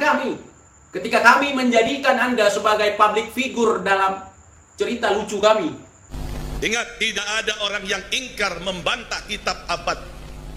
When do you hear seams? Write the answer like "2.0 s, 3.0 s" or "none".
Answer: 6.1 s